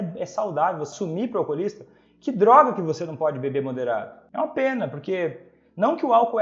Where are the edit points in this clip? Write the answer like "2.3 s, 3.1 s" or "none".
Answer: 0.9 s, 4.2 s